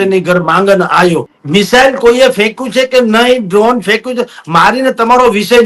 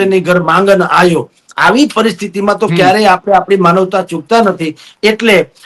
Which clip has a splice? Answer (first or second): first